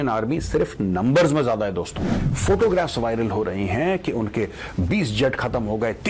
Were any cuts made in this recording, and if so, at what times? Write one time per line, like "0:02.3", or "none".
0:02.3